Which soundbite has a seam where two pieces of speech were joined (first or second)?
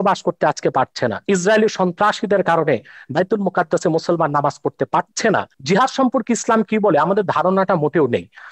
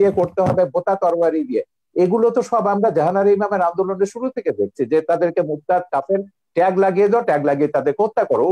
first